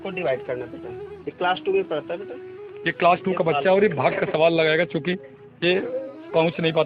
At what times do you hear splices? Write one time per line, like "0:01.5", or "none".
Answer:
none